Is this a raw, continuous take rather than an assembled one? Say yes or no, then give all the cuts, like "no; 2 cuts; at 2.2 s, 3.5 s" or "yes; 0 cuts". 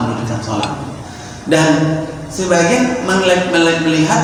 yes; 0 cuts